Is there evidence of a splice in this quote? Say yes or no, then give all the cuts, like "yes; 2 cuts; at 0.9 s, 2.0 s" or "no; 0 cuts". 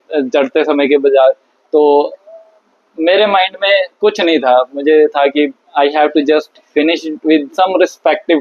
no; 0 cuts